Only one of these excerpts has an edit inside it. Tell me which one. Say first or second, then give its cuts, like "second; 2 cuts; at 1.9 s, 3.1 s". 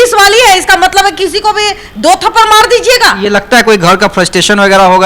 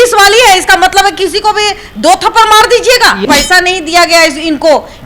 second; 1 cut; at 3.2 s